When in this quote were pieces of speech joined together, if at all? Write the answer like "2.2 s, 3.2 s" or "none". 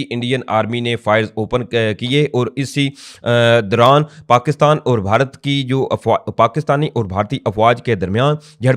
none